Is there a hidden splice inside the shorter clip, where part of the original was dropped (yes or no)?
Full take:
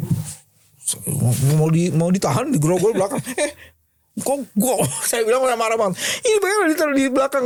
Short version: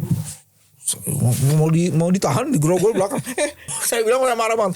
yes